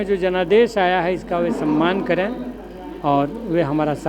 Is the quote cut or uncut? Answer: uncut